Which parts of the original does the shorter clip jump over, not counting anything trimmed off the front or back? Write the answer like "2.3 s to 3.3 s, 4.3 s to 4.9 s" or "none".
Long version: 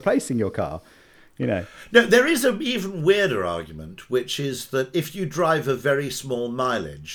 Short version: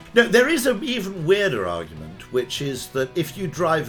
none